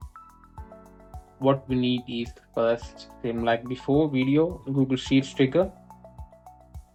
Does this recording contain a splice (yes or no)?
no